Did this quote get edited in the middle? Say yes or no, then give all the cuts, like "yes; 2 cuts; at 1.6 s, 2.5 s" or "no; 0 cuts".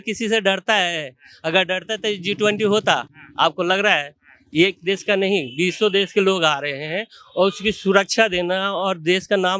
no; 0 cuts